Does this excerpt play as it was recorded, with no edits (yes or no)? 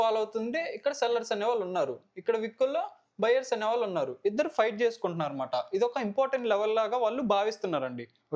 yes